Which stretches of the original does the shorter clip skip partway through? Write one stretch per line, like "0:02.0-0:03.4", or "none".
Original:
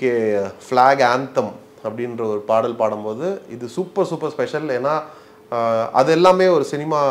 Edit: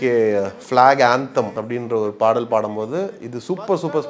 0:01.6-0:01.9